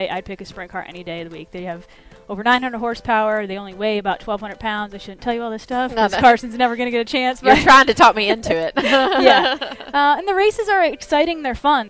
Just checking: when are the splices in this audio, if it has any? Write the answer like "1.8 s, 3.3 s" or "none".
11.0 s